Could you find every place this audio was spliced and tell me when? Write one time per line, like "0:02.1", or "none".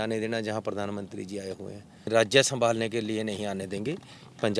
0:02.1